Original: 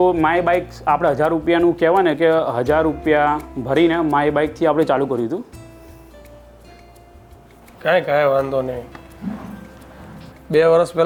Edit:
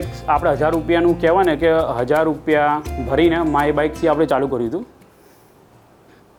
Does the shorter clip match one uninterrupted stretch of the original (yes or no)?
yes